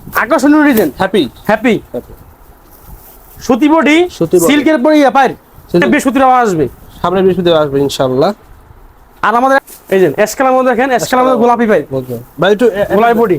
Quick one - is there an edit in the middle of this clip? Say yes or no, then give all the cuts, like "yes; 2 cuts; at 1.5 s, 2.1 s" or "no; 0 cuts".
yes; 2 cuts; at 5.8 s, 9.6 s